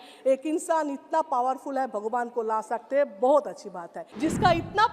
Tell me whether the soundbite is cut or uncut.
cut